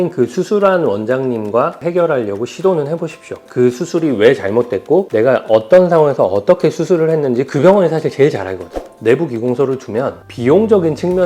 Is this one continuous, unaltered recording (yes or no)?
no